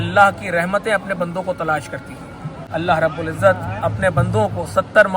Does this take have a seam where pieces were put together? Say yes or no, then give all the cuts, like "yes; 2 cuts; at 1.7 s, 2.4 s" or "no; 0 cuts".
yes; 1 cut; at 2.6 s